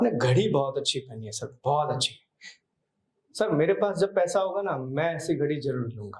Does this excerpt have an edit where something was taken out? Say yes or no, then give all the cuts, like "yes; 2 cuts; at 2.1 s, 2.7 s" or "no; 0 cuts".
no; 0 cuts